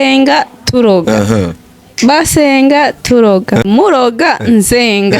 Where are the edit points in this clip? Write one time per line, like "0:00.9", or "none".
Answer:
0:03.6